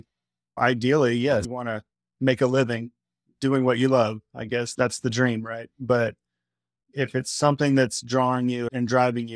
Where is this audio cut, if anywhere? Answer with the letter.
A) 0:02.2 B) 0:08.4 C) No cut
C